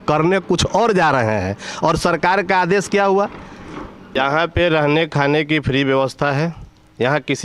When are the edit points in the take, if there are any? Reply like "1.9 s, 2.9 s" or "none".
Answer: 4.1 s